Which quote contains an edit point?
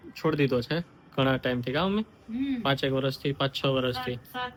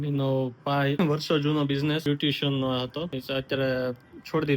second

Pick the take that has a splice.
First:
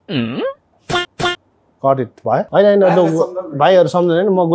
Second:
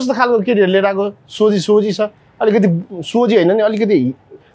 first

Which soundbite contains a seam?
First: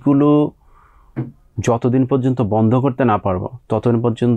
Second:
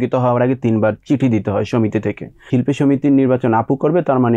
second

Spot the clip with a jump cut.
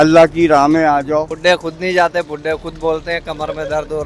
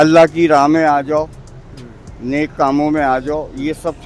first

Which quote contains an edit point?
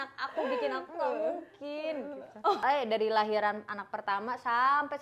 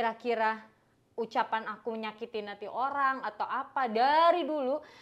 first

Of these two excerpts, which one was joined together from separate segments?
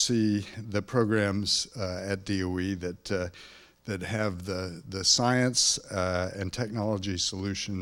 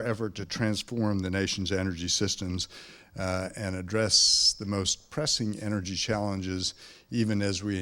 second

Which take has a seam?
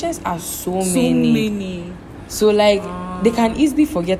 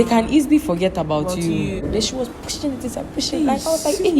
second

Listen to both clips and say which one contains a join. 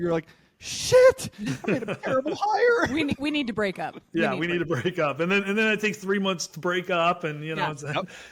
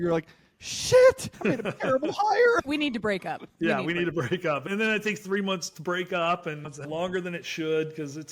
second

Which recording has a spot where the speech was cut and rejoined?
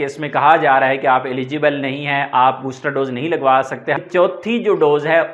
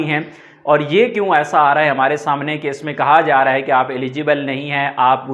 first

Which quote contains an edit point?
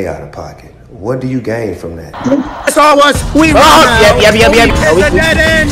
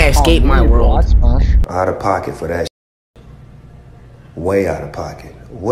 first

